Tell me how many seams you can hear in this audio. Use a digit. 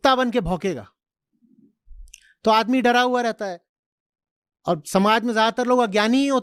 0